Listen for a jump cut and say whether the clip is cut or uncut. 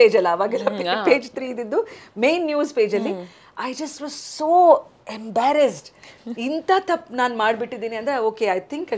uncut